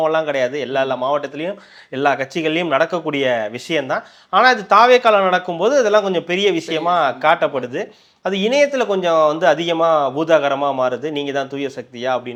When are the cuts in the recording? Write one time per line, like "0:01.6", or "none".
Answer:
none